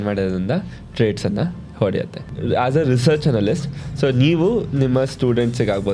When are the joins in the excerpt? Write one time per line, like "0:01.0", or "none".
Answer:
0:02.2